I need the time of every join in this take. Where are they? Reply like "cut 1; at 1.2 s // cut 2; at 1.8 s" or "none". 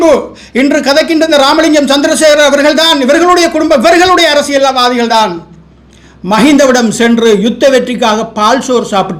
none